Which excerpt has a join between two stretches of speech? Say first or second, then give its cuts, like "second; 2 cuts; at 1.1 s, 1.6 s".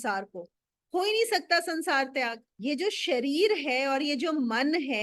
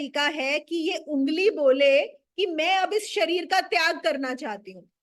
first; 1 cut; at 2.4 s